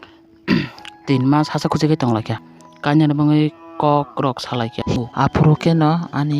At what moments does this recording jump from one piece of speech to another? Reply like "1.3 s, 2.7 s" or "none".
2.4 s, 5.0 s